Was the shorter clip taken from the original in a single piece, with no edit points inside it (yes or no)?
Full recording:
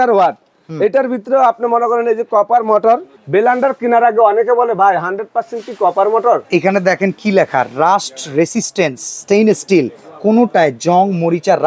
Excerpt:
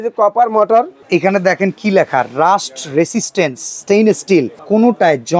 no